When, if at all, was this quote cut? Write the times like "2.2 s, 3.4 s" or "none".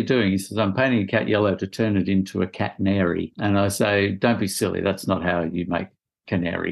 3.3 s